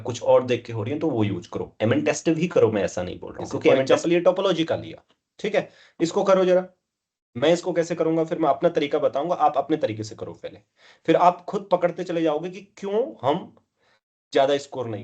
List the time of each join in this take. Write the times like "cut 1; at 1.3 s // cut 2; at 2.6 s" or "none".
cut 1; at 3.9 s